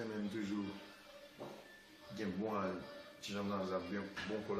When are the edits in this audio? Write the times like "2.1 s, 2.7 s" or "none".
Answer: none